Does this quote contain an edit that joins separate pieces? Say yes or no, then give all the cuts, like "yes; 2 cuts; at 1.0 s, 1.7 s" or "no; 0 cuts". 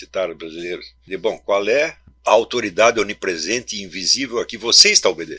yes; 2 cuts; at 0.9 s, 2.1 s